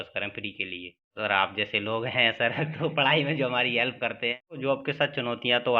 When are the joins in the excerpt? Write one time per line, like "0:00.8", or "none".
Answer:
0:01.1
0:04.6